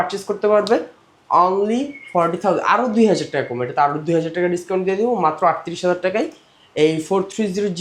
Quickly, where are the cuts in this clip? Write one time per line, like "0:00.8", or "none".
none